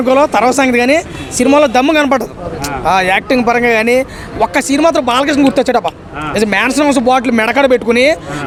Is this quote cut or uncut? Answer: uncut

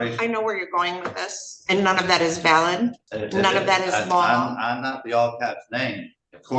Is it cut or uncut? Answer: cut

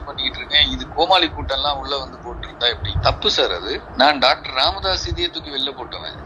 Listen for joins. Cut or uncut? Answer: cut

